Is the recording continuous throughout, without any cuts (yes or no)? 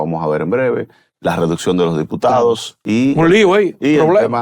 no